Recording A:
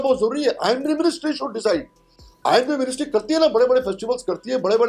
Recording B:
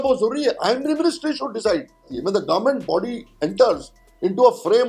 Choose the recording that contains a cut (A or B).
B